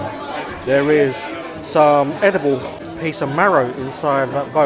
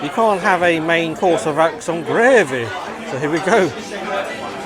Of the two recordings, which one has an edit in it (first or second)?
first